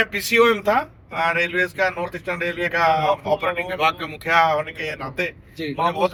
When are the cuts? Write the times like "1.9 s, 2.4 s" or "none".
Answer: none